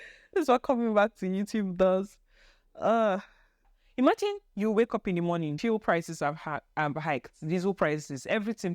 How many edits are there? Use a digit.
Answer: 2